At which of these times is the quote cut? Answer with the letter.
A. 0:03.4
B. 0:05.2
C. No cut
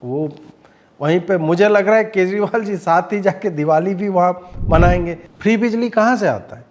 B